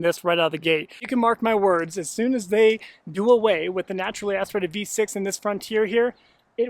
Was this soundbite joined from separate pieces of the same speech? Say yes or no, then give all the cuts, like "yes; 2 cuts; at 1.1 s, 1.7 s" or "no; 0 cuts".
yes; 1 cut; at 1.0 s